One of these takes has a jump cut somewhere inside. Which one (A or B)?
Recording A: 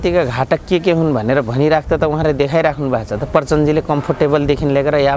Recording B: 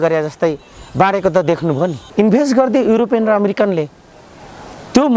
B